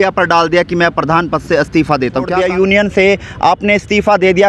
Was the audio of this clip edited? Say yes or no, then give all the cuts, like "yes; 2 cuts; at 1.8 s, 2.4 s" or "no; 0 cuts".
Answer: yes; 1 cut; at 2.3 s